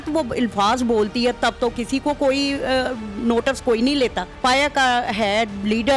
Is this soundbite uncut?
no; 1 cut; at 4.4 s

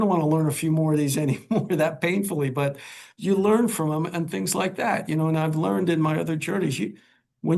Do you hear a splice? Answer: no; 0 cuts

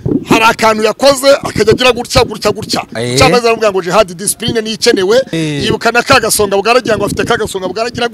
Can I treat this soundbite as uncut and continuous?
no; 1 cut; at 5.4 s

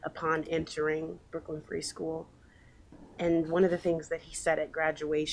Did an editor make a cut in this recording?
yes; 1 cut; at 2.9 s

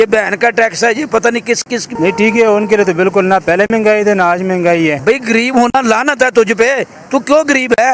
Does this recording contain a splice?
yes; 2 cuts; at 1.9 s, 5.0 s

